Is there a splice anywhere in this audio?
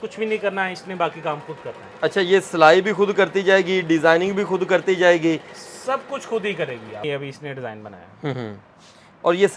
yes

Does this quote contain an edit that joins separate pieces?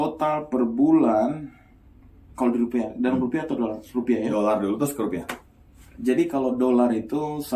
no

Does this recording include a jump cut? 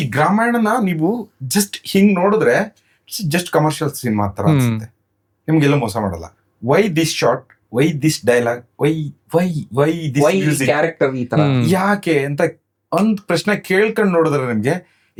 no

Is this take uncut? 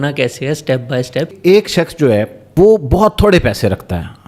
no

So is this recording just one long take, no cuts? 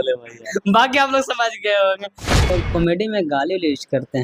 no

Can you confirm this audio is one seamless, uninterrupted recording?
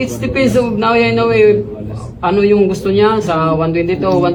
yes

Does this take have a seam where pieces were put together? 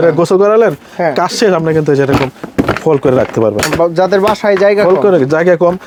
no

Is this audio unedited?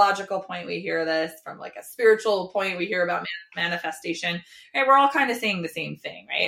yes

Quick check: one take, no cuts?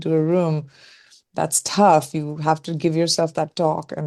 yes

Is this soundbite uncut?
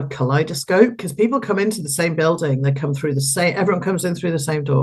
yes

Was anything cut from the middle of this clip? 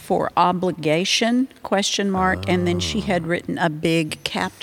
no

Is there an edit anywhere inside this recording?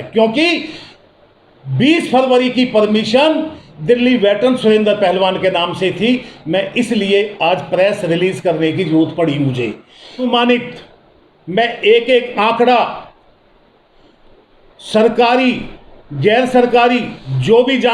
yes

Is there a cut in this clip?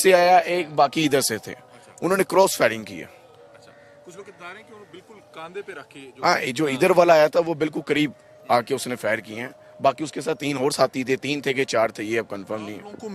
no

